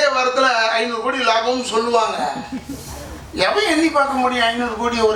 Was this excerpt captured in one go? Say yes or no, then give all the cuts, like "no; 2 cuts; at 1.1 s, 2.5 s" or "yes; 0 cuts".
yes; 0 cuts